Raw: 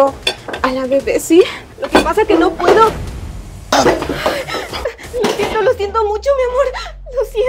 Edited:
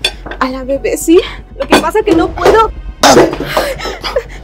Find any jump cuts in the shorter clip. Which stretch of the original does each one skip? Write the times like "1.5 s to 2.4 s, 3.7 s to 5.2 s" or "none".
3.1 s to 3.5 s